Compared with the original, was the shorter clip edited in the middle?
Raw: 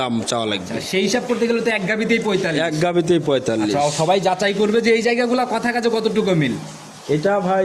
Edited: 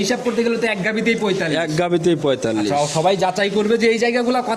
no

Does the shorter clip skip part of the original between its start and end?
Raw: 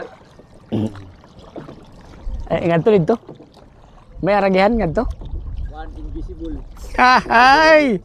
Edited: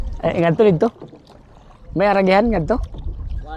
no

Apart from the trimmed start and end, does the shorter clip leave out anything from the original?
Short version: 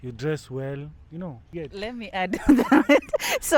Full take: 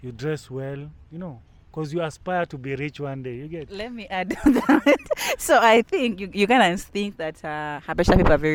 yes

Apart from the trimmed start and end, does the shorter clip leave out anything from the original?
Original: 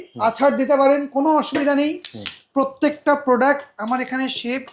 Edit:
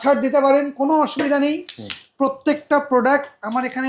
no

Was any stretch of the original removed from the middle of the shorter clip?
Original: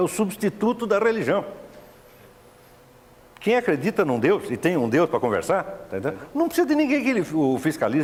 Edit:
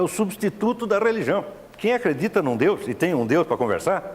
yes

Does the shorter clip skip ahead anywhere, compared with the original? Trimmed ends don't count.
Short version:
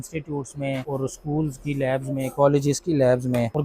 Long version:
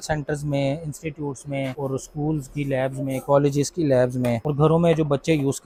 no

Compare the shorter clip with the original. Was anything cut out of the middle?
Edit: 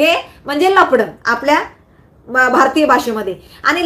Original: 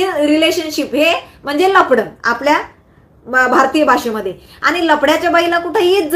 no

